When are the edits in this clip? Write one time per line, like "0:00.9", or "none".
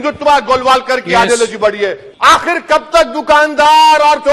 0:02.1